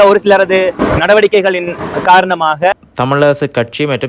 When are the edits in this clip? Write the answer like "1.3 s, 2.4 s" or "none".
2.7 s